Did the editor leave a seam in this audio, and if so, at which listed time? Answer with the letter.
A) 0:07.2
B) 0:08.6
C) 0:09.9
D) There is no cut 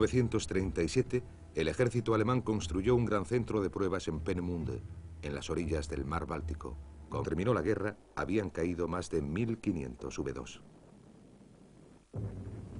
D